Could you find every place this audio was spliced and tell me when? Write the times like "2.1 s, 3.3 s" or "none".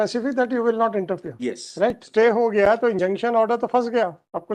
2.0 s